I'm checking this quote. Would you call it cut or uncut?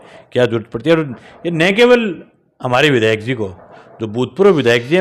uncut